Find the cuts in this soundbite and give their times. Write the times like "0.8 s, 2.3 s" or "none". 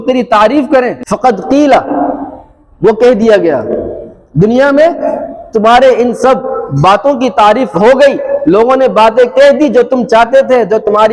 1.0 s